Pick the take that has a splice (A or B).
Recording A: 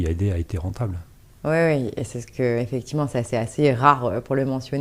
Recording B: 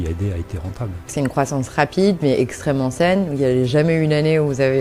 B